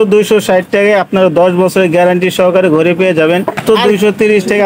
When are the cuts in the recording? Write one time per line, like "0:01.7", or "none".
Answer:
0:03.8